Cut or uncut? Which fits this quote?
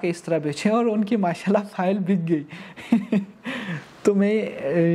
uncut